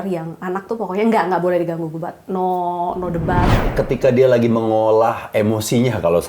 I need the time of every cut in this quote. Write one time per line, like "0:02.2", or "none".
0:03.6